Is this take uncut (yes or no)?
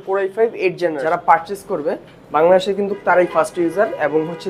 no